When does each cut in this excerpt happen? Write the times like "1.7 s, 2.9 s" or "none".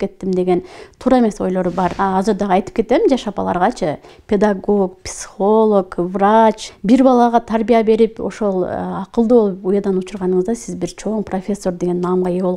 1.9 s, 4.1 s, 6.7 s